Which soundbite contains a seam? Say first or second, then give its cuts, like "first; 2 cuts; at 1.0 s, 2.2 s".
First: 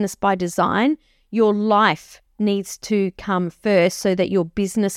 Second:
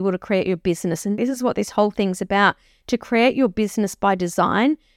second; 1 cut; at 1.1 s